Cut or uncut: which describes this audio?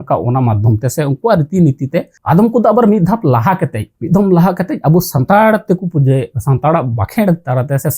cut